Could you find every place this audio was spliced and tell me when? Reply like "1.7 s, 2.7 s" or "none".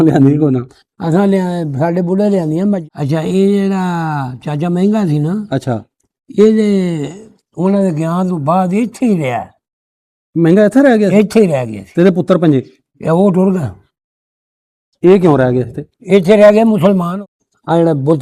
2.9 s, 17.2 s